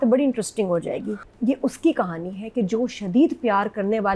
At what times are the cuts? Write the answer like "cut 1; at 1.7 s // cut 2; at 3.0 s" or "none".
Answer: cut 1; at 1.2 s